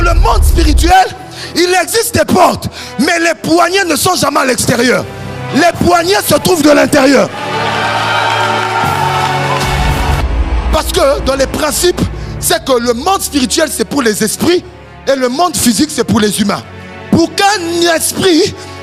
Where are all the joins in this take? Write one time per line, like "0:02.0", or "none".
0:10.2